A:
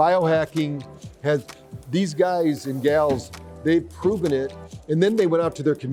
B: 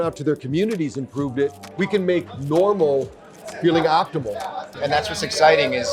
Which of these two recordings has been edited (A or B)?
B